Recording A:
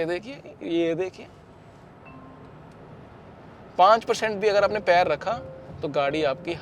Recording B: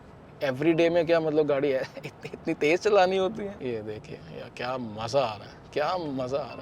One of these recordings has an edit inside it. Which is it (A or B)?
B